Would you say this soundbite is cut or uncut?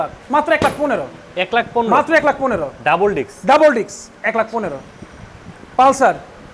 uncut